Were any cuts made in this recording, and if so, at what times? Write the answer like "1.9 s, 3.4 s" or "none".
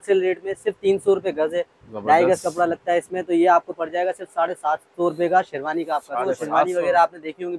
6.7 s